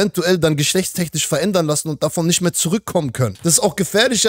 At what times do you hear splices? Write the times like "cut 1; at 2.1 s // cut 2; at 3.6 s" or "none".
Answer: cut 1; at 3.3 s